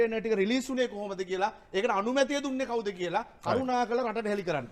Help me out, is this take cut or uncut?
uncut